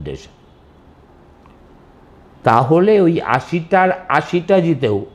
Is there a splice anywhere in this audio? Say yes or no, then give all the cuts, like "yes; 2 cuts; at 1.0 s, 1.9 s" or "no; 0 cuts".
no; 0 cuts